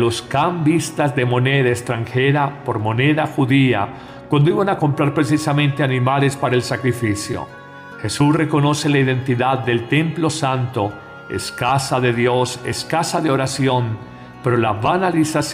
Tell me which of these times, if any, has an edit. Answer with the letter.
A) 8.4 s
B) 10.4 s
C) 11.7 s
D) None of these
A